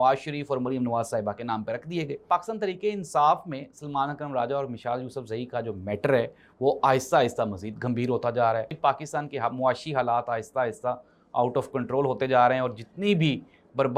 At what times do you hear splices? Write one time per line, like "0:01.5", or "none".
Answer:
0:02.2
0:08.7